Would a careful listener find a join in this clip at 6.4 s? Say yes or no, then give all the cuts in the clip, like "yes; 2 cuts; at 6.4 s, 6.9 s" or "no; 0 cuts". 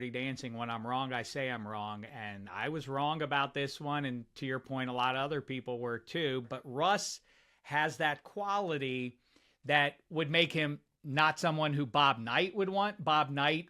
yes; 1 cut; at 6.4 s